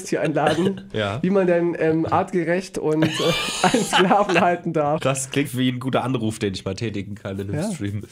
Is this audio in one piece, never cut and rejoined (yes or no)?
no